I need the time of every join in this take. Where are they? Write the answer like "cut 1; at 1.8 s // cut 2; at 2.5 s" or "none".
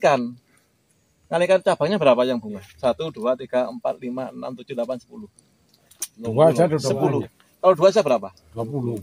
none